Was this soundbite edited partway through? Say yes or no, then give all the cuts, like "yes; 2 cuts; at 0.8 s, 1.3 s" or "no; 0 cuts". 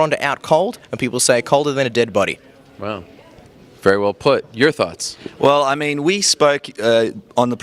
yes; 1 cut; at 4.9 s